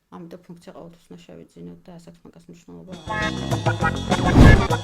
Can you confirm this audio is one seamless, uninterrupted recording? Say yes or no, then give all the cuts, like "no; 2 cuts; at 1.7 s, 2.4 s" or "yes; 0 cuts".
no; 1 cut; at 3.0 s